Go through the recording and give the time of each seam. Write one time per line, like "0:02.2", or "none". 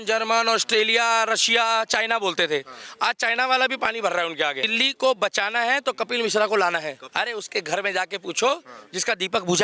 0:04.7
0:07.0